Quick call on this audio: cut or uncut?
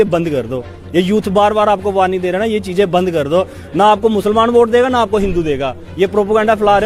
uncut